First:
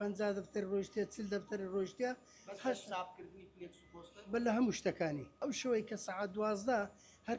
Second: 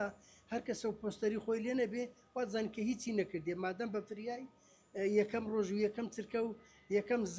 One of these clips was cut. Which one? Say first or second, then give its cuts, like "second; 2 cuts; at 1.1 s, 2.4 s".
first; 1 cut; at 5.4 s